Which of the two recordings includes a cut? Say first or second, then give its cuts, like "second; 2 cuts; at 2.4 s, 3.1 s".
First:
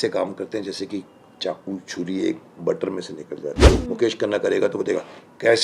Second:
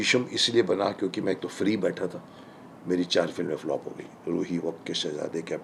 first; 1 cut; at 3.7 s